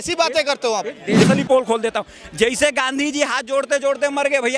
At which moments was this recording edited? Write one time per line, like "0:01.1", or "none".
0:01.2